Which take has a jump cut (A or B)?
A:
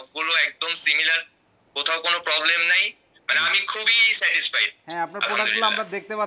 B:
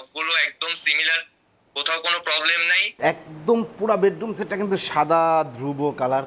B